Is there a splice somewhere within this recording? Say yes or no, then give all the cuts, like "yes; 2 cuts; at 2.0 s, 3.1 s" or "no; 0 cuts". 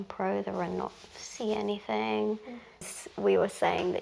yes; 1 cut; at 2.9 s